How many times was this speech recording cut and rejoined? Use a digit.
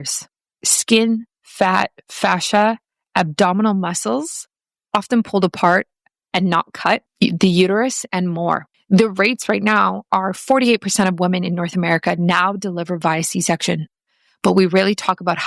2